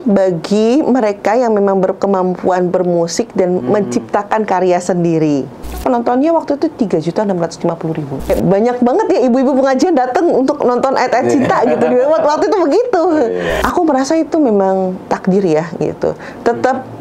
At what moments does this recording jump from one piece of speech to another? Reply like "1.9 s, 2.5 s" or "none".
5.8 s, 8.3 s, 13.6 s